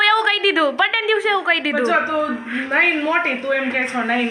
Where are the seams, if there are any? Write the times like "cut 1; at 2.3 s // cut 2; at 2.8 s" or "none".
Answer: none